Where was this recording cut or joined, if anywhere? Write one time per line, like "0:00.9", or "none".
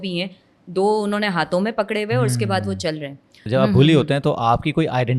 0:03.4